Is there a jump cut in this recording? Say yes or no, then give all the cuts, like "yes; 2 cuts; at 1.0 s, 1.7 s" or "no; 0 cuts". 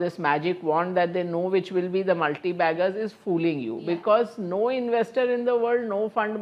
no; 0 cuts